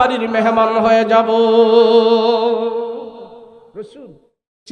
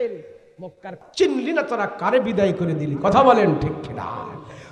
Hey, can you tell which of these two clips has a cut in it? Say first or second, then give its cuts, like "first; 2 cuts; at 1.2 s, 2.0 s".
second; 1 cut; at 1.0 s